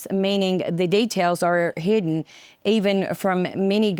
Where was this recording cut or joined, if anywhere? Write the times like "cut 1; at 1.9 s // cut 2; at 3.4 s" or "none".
none

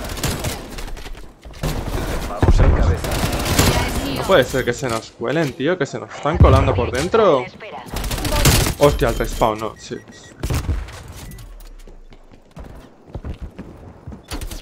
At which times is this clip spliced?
cut 1; at 1.6 s

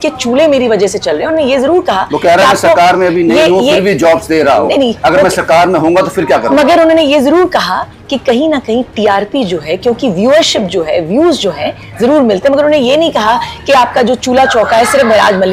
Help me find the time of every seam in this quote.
none

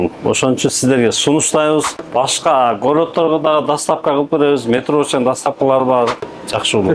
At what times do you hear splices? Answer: cut 1; at 2.0 s // cut 2; at 6.2 s

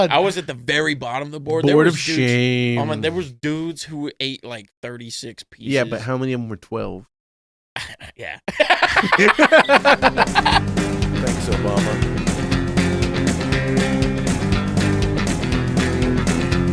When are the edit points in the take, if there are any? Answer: cut 1; at 10.6 s

